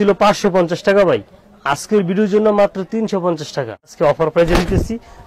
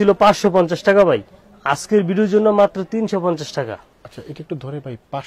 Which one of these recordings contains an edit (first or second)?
first